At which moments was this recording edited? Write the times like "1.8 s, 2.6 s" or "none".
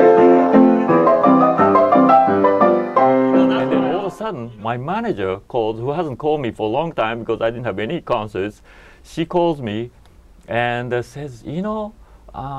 3.9 s